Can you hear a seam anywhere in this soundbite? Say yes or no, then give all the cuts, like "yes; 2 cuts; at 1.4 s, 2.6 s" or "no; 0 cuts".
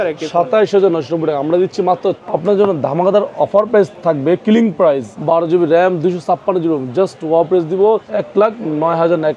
yes; 4 cuts; at 2.2 s, 3.9 s, 5.1 s, 8.1 s